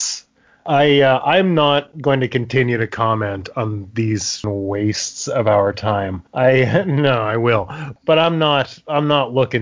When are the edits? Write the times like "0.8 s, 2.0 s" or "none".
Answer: 4.4 s, 7.9 s